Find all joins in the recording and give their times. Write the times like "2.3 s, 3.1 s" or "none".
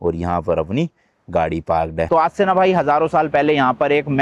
2.1 s